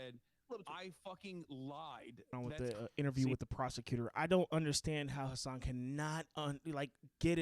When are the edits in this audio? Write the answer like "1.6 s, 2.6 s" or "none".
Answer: 2.3 s